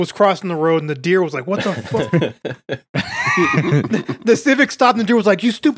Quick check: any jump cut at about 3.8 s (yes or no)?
yes